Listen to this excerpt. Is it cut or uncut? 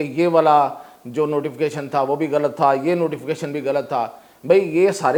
uncut